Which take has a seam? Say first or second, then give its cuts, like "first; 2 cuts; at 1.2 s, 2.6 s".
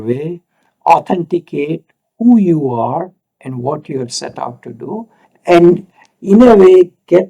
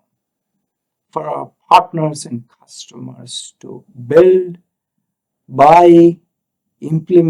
first; 1 cut; at 5.2 s